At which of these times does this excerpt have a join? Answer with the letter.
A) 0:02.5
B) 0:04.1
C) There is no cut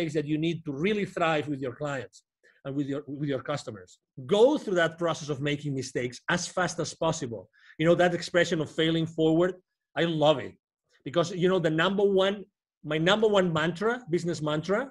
B